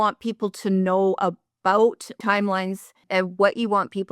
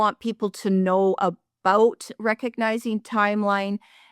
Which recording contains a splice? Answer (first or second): first